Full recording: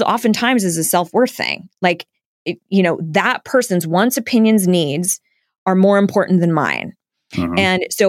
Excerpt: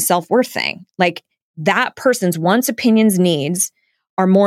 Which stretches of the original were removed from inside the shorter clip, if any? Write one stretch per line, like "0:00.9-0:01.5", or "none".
0:02.4-0:03.0